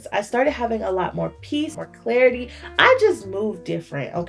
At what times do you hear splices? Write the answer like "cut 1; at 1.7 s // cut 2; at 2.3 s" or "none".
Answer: cut 1; at 1.7 s